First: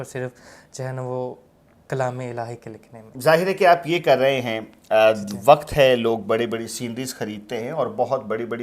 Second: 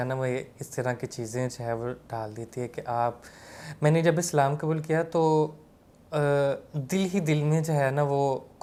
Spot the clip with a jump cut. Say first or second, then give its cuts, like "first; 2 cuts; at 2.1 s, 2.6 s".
first; 1 cut; at 3.0 s